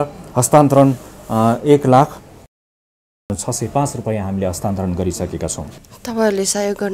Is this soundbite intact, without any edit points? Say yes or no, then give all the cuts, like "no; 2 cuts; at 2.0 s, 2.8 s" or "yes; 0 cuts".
yes; 0 cuts